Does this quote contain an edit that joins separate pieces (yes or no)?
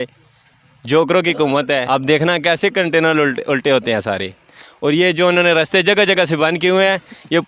yes